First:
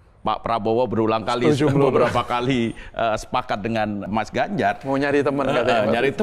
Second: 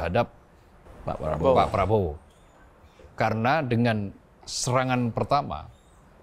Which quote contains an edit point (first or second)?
first